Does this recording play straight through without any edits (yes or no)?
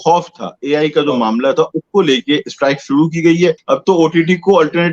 no